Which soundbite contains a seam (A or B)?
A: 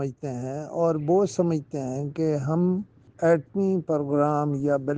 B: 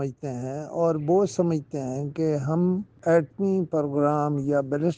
B